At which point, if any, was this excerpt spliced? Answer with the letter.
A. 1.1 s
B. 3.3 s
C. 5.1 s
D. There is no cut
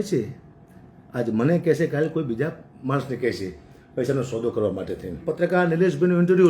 C